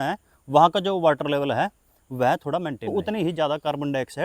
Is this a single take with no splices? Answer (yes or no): no